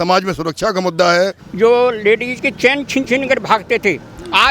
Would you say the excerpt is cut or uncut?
cut